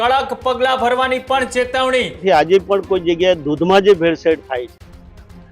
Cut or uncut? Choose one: cut